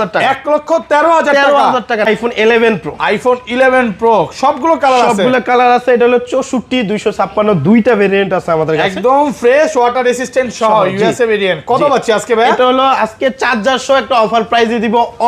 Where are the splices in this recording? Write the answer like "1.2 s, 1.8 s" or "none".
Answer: 2.1 s